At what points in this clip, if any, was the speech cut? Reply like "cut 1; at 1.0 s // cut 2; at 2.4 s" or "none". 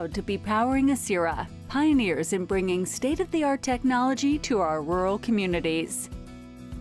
cut 1; at 5.9 s